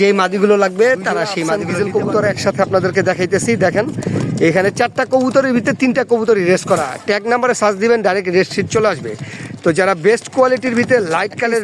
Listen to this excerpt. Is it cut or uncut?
cut